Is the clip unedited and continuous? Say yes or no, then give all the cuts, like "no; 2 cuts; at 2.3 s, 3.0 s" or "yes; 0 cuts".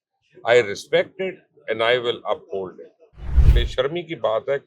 no; 1 cut; at 3.4 s